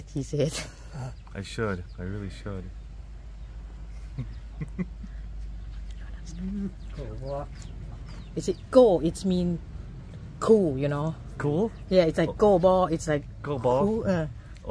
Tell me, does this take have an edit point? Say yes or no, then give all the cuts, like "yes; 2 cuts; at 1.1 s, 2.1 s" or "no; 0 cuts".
no; 0 cuts